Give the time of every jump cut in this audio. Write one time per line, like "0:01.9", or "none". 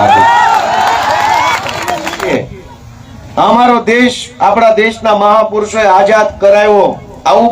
0:02.3